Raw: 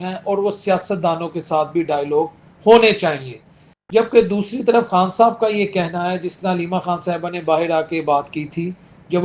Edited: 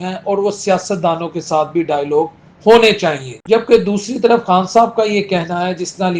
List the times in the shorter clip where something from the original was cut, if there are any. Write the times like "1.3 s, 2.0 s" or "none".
3.3 s